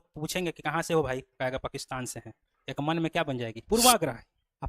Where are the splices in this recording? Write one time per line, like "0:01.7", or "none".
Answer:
0:03.6